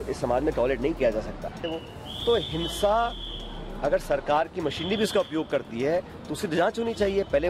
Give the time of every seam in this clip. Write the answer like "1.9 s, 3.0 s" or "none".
1.6 s

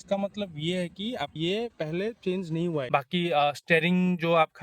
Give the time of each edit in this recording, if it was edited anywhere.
1.3 s, 2.8 s

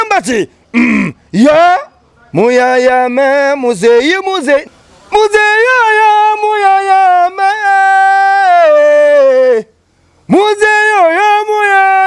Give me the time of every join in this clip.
4.7 s

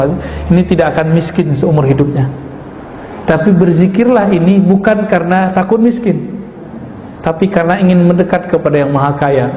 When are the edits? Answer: none

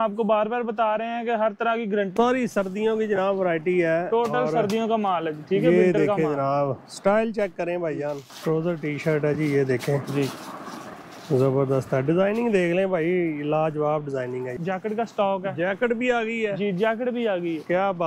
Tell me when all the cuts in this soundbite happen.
2.1 s, 8.3 s, 10.8 s, 14.5 s

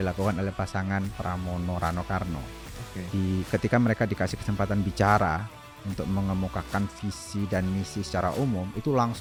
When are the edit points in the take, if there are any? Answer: none

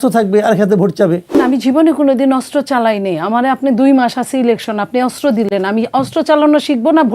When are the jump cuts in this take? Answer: 1.3 s

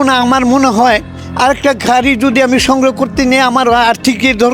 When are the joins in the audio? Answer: none

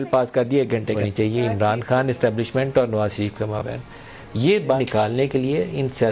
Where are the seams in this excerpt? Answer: 1.0 s, 4.8 s

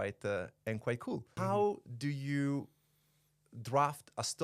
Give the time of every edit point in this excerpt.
1.3 s

